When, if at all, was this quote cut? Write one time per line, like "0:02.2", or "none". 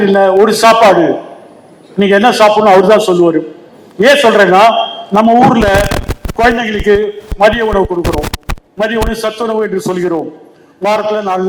none